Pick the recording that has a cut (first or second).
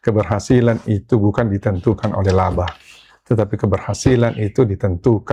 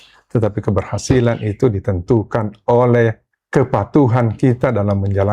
second